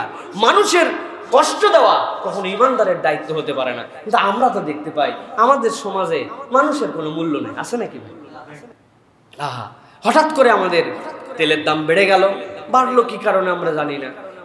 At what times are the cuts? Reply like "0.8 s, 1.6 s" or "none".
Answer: none